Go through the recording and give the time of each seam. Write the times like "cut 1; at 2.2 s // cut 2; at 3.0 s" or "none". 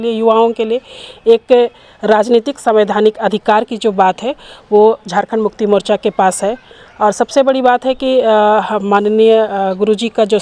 none